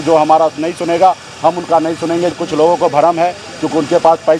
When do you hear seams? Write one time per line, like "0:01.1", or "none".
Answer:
0:02.3